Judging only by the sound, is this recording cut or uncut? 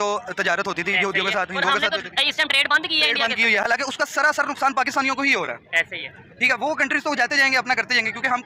uncut